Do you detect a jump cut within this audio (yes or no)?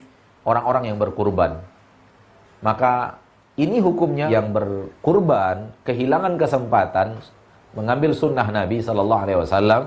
yes